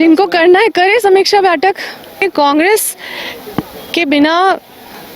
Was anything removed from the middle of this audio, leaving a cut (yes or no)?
yes